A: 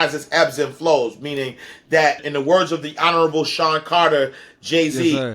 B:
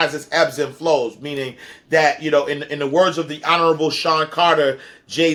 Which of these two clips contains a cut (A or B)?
A